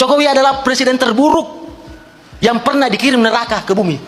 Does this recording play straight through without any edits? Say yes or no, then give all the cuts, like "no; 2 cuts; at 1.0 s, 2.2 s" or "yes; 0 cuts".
yes; 0 cuts